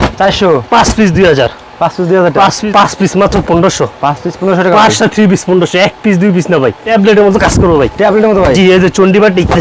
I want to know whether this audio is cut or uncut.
cut